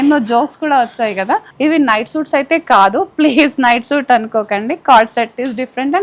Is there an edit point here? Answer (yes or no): yes